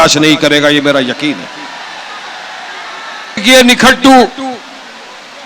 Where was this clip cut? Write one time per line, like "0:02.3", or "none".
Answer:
0:03.4